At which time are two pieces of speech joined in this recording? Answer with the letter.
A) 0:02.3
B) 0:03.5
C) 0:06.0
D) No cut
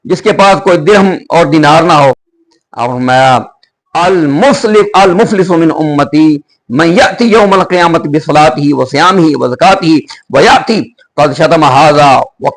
A